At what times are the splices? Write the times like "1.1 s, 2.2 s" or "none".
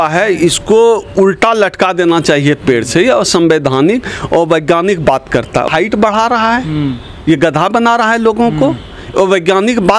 5.7 s